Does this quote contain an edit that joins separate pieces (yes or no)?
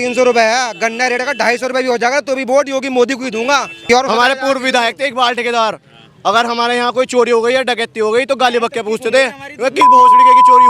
yes